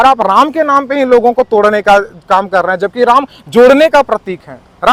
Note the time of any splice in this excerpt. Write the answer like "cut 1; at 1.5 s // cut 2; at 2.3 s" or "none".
none